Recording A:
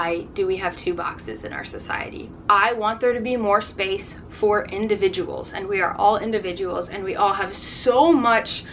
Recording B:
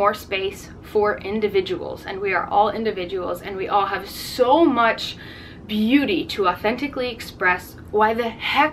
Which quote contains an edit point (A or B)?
A